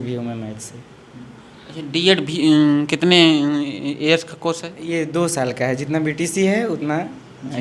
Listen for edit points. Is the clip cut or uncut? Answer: uncut